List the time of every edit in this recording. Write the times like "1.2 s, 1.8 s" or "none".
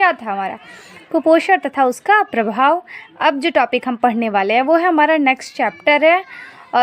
1.2 s